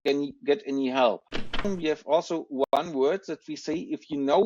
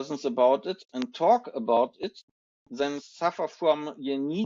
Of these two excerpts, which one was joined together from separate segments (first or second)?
first